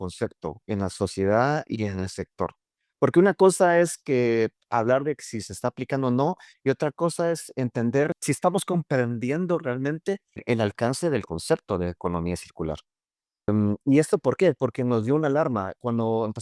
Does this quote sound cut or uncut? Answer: uncut